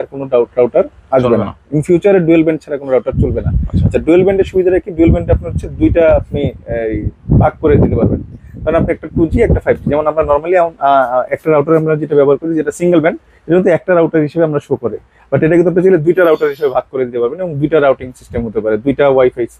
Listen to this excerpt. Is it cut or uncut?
uncut